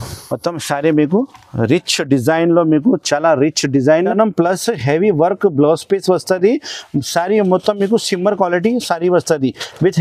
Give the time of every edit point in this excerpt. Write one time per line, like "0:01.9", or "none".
0:04.1